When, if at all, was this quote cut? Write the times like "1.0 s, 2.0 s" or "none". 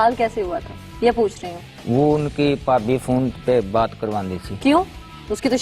none